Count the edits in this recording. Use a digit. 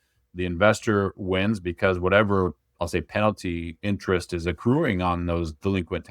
0